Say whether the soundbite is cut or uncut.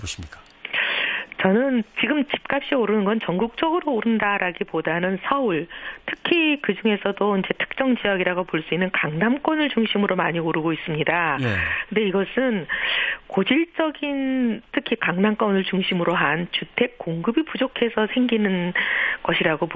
cut